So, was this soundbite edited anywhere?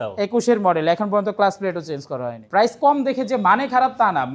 yes; 1 cut; at 2.7 s

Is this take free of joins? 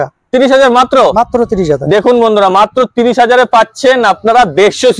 yes; 0 cuts

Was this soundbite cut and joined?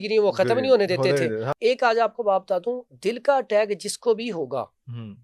yes; 1 cut; at 1.5 s

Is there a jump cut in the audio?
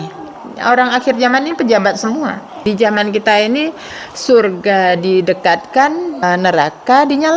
yes; 2 cuts; at 2.6 s, 6.2 s

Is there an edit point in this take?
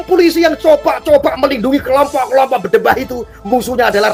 no; 0 cuts

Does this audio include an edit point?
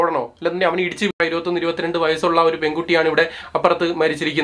yes; 1 cut; at 1.2 s

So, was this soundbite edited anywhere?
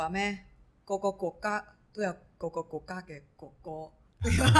no; 0 cuts

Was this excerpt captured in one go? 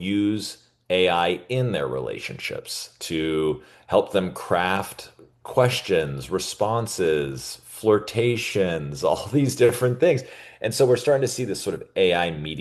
yes; 0 cuts

